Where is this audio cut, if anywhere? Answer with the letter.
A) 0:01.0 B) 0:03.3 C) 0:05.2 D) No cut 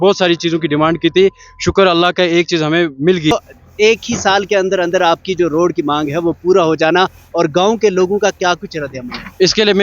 B